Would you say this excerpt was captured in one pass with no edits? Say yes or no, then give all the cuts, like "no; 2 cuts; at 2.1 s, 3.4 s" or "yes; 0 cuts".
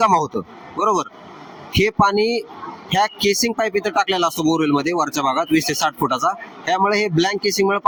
yes; 0 cuts